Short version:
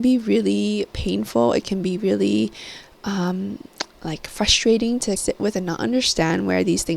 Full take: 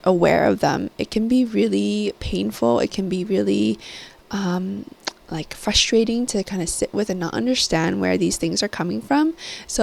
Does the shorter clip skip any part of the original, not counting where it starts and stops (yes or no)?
yes